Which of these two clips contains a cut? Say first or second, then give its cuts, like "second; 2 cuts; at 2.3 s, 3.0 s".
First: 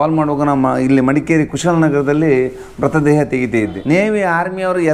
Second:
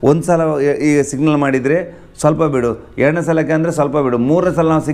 first; 1 cut; at 3.8 s